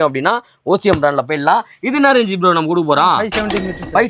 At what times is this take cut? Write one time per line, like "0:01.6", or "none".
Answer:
none